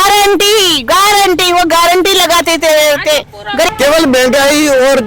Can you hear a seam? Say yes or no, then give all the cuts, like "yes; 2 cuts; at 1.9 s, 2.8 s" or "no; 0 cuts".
yes; 1 cut; at 3.7 s